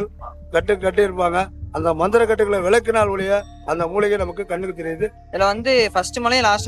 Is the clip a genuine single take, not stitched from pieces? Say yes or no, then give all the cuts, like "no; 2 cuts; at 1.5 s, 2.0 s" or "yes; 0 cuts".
no; 1 cut; at 5.2 s